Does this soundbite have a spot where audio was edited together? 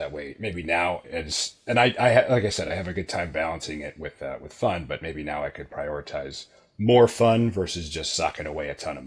no; 0 cuts

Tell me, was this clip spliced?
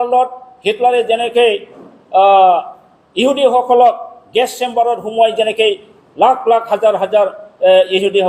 no; 0 cuts

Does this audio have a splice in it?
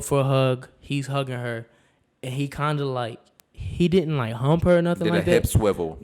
no; 0 cuts

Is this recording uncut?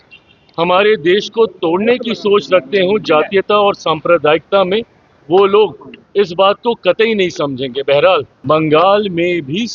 no; 1 cut; at 8.3 s

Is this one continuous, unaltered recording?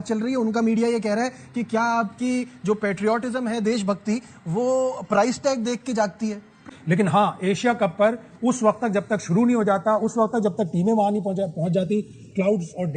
no; 1 cut; at 6.7 s

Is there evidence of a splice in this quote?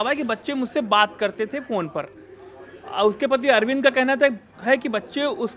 no; 0 cuts

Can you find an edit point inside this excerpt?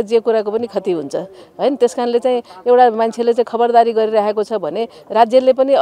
no; 0 cuts

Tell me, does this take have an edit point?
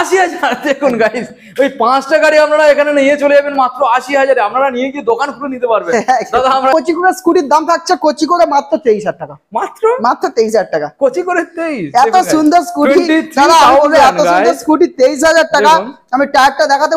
yes; 1 cut; at 6.7 s

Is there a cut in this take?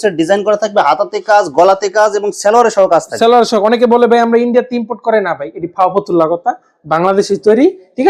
no; 0 cuts

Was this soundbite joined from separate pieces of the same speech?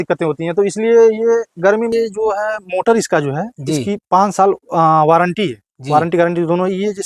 yes; 1 cut; at 1.9 s

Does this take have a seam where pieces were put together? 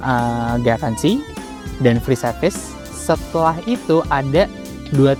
no; 0 cuts

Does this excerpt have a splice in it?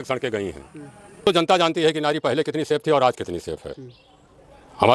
yes; 1 cut; at 1.3 s

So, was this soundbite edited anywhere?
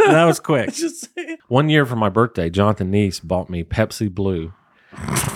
yes; 1 cut; at 1.3 s

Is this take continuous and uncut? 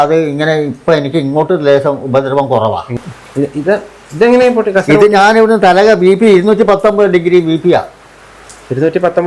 no; 1 cut; at 2.9 s

